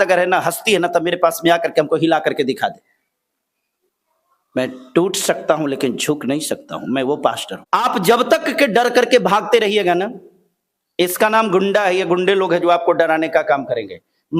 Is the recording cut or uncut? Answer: cut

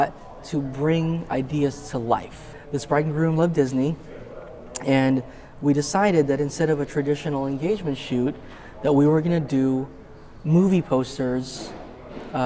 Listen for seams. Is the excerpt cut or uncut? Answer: cut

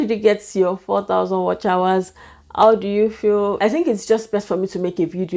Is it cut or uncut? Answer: cut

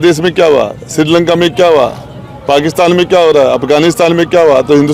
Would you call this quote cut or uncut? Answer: uncut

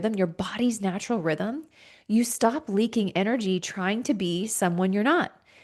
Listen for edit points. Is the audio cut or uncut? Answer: uncut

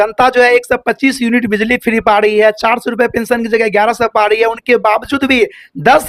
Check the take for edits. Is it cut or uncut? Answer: uncut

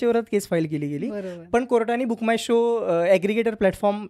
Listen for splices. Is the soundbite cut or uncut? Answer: uncut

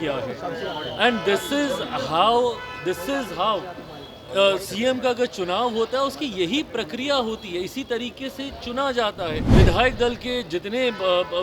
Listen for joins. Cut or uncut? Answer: cut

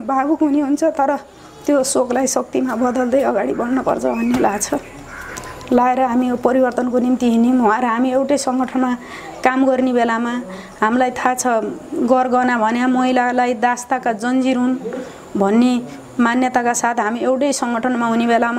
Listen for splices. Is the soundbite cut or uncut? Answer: uncut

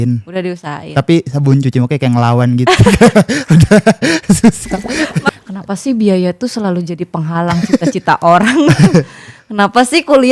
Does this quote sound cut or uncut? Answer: cut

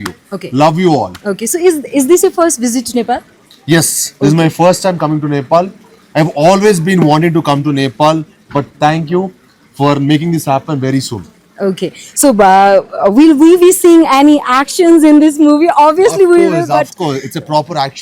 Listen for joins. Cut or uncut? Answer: uncut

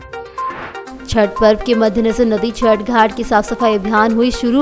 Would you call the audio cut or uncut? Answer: cut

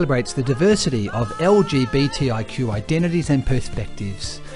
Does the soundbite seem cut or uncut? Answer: uncut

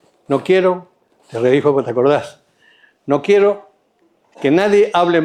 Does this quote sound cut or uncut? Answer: uncut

